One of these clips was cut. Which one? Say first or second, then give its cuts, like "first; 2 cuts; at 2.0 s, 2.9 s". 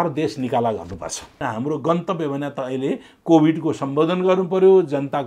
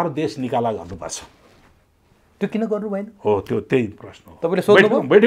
first; 1 cut; at 1.4 s